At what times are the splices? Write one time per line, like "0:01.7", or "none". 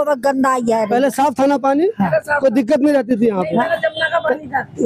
none